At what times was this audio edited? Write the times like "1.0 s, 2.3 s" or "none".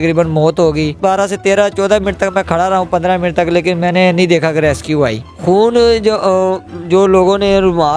0.9 s, 5.3 s